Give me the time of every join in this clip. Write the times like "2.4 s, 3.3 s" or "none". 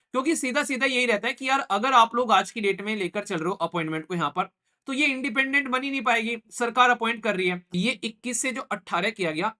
7.6 s